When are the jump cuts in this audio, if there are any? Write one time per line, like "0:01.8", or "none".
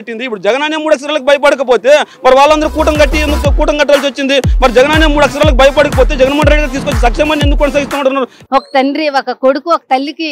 0:08.4